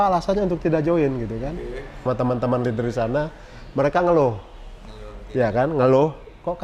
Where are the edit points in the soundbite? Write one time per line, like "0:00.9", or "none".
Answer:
0:02.0